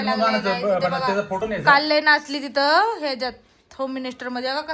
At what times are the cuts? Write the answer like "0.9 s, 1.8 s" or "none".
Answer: none

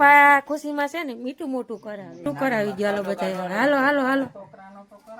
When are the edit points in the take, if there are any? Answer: 2.2 s

